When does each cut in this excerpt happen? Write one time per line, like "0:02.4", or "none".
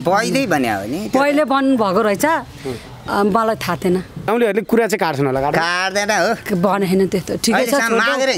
0:04.3